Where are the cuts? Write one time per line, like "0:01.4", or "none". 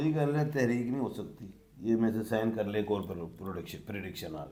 none

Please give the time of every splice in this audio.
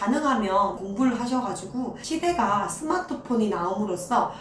0:00.8
0:02.0

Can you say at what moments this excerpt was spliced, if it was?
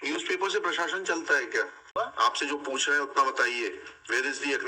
0:01.9

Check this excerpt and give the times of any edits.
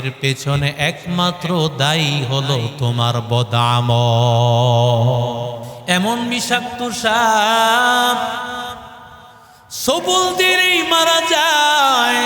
0:05.7

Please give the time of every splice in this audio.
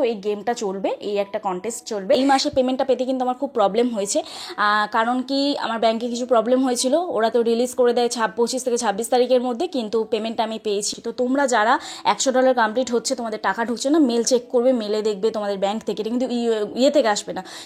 0:02.2
0:10.9

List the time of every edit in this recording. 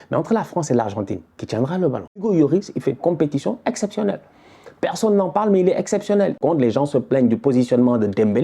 0:02.2
0:06.4

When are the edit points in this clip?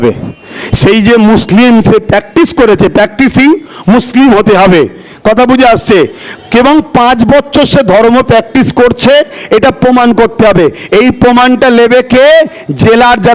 none

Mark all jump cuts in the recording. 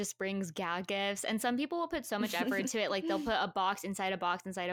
none

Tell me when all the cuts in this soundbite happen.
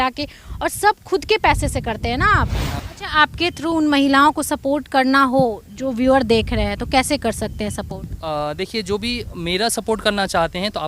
0:02.8

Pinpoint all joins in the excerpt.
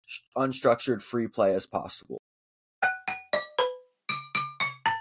0:02.8

